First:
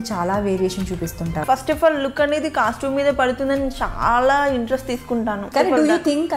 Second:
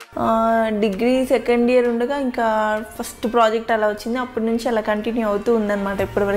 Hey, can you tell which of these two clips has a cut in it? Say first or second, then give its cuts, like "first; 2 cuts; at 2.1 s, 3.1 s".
first; 2 cuts; at 1.4 s, 5.4 s